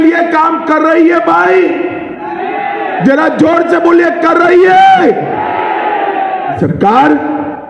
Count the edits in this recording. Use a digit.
1